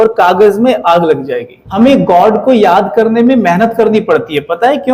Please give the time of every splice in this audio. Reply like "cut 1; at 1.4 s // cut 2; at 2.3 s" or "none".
cut 1; at 1.6 s